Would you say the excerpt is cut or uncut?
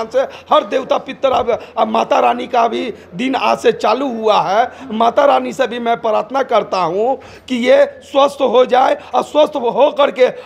uncut